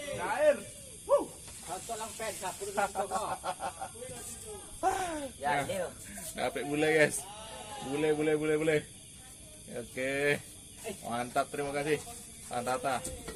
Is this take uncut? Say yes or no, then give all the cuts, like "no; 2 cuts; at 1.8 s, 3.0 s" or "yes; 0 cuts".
yes; 0 cuts